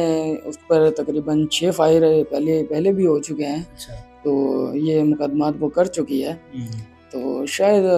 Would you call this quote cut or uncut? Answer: uncut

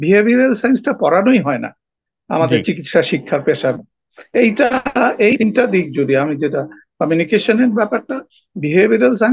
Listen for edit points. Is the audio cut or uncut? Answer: uncut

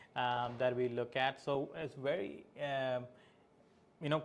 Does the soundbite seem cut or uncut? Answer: uncut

